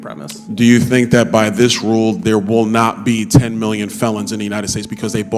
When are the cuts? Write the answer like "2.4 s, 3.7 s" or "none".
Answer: none